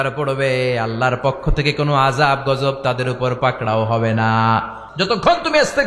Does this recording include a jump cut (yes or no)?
yes